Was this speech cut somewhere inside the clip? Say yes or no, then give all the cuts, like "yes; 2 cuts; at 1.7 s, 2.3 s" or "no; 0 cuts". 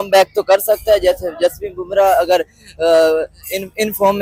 no; 0 cuts